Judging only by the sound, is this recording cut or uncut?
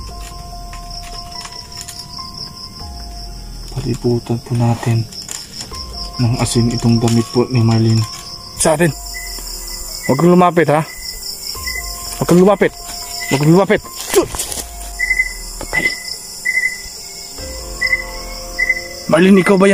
cut